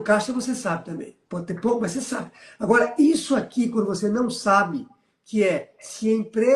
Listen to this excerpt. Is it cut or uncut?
cut